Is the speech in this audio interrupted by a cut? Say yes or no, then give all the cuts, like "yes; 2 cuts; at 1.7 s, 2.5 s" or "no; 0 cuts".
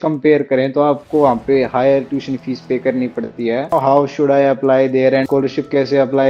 yes; 2 cuts; at 3.7 s, 5.2 s